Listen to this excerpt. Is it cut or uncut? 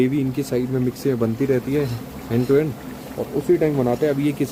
uncut